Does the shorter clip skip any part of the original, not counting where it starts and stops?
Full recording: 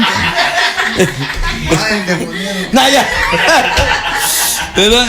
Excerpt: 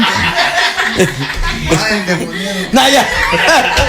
no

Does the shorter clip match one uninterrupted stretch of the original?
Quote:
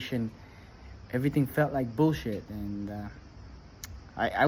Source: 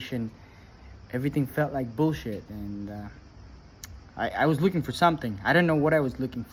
yes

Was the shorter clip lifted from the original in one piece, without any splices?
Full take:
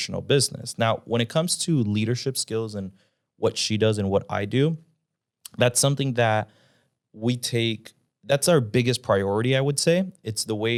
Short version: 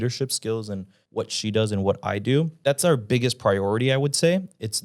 no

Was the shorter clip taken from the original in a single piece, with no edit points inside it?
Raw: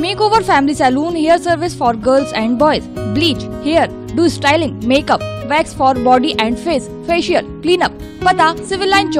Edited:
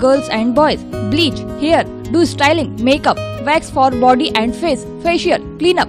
yes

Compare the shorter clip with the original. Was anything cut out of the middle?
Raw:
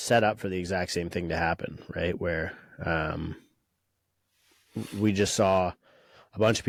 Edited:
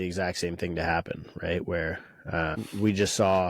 yes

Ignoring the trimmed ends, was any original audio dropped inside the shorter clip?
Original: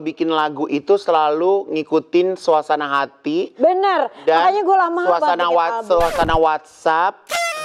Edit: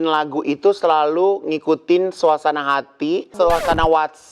yes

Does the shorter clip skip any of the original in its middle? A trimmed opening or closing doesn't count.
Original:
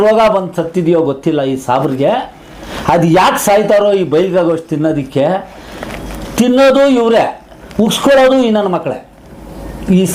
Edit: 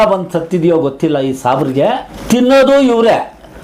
yes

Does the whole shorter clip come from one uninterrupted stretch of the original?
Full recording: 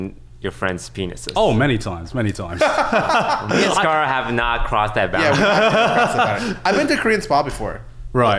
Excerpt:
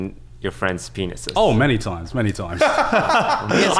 yes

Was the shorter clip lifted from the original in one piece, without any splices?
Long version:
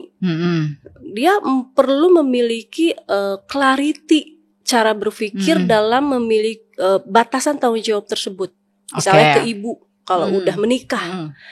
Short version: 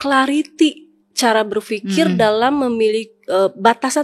yes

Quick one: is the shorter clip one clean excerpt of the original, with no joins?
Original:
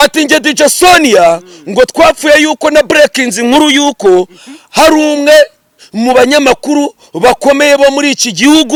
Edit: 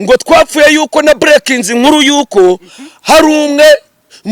yes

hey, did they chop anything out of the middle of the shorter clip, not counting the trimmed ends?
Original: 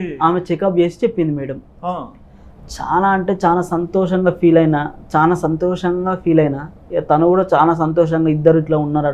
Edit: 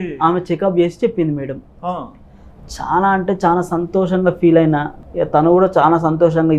yes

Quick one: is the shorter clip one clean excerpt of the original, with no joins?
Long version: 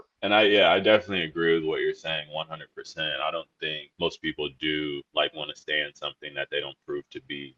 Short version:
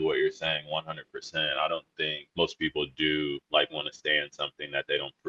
yes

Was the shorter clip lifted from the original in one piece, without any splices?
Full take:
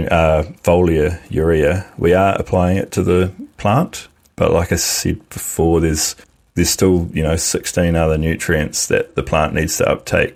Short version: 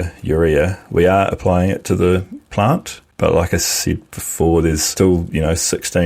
no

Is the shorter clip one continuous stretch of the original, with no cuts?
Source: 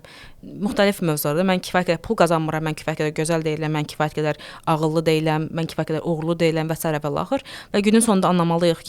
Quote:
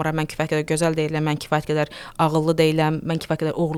yes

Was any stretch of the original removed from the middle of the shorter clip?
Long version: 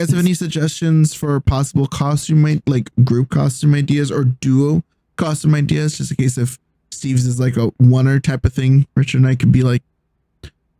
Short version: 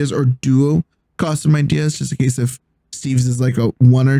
no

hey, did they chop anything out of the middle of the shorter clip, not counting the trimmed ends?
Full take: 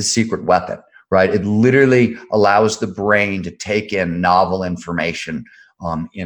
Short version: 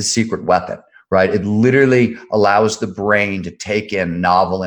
no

